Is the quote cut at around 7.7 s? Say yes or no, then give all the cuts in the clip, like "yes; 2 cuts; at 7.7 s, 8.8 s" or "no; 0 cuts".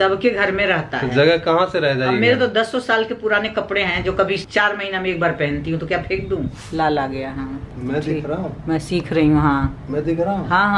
yes; 2 cuts; at 6.6 s, 7.7 s